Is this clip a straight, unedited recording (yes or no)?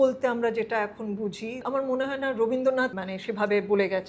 no